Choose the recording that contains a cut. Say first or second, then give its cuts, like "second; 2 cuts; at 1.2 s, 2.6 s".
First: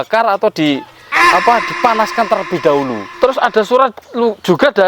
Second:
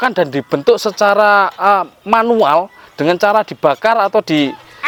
first; 1 cut; at 3.0 s